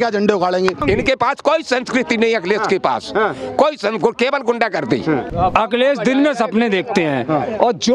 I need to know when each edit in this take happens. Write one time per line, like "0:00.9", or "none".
0:00.8
0:05.3